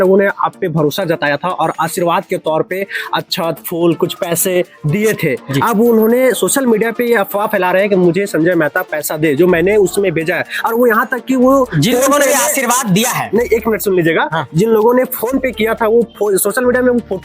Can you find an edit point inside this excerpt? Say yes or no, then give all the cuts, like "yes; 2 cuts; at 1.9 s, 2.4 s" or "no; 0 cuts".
no; 0 cuts